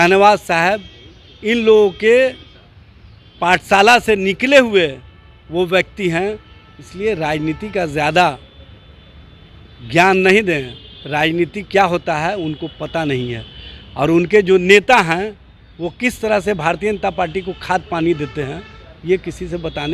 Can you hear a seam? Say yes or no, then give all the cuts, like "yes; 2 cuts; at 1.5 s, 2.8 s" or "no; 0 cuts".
no; 0 cuts